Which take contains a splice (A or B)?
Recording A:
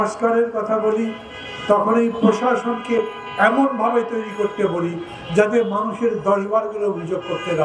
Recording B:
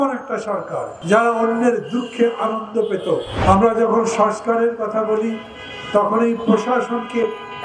B